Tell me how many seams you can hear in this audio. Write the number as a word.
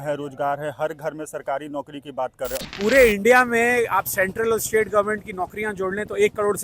one